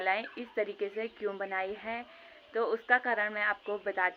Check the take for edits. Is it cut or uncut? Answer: uncut